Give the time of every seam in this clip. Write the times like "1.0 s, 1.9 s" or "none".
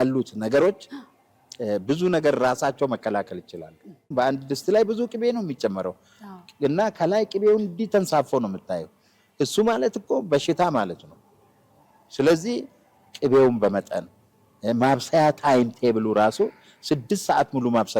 4.1 s